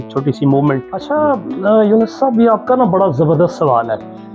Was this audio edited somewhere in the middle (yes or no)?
yes